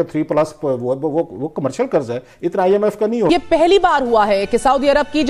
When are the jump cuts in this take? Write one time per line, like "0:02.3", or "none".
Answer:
0:03.3

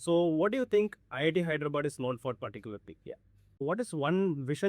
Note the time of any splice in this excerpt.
0:03.6

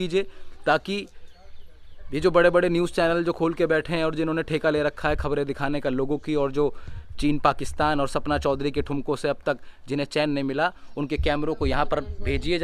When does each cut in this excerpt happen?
none

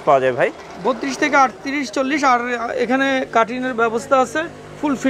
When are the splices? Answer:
none

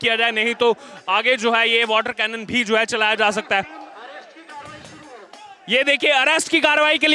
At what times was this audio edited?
none

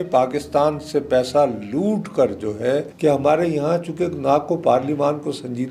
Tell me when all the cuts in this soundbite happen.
0:02.9

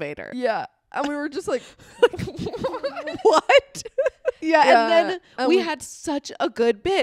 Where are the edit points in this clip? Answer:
0:04.3

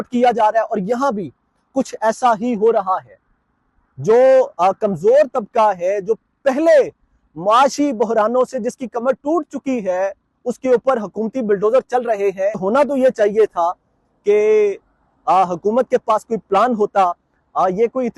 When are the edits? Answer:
0:12.6

